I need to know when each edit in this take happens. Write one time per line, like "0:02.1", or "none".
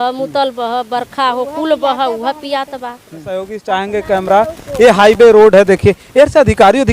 0:03.5